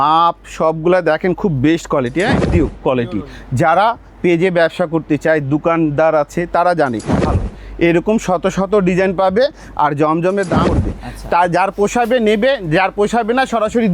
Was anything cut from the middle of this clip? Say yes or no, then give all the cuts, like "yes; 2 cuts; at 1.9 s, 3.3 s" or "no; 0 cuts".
yes; 3 cuts; at 2.5 s, 7.2 s, 10.7 s